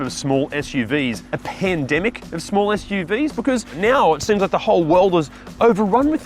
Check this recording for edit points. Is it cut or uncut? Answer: cut